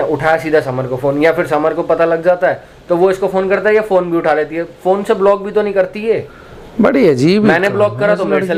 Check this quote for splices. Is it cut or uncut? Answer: uncut